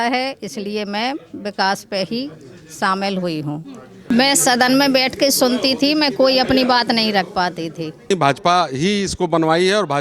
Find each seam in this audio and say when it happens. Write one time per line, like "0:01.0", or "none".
0:03.9
0:08.1